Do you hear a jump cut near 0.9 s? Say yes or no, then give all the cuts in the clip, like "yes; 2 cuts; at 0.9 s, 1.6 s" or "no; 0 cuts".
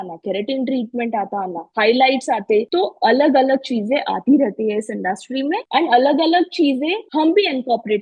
no; 3 cuts; at 2.7 s, 5.6 s, 7.0 s